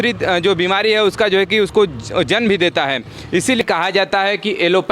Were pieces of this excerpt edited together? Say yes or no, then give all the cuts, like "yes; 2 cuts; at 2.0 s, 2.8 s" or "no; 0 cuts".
yes; 1 cut; at 3.6 s